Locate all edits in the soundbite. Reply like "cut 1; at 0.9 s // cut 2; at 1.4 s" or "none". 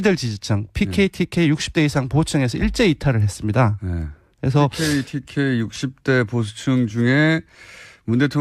cut 1; at 2.5 s